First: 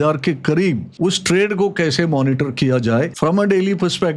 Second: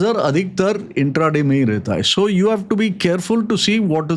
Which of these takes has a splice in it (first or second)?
first